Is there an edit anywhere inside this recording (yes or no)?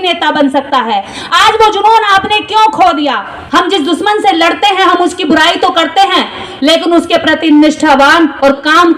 yes